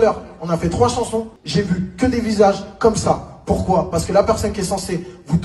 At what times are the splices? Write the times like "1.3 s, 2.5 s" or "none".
1.4 s